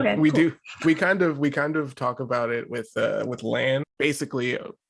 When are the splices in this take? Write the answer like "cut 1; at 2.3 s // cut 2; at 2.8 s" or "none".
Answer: cut 1; at 3.9 s